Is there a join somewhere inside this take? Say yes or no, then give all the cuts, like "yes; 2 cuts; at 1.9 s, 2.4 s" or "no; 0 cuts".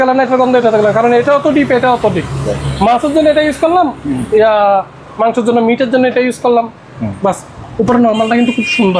no; 0 cuts